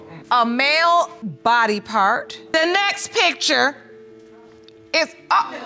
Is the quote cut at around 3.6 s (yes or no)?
no